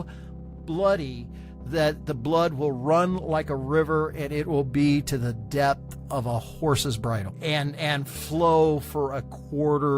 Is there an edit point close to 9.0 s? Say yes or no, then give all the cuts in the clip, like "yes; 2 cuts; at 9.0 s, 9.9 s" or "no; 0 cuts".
no; 1 cut; at 7.3 s